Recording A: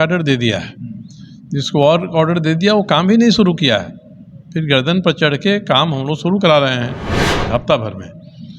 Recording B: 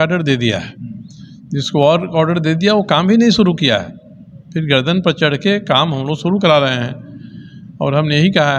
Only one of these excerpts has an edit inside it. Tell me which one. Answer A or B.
A